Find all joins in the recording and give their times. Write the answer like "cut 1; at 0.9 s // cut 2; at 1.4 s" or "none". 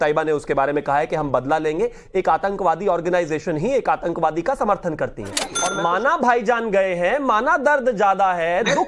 cut 1; at 5.6 s